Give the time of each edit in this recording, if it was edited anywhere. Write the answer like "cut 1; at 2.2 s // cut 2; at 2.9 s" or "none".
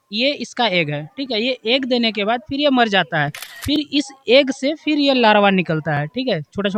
none